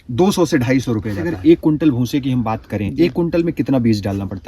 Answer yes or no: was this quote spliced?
yes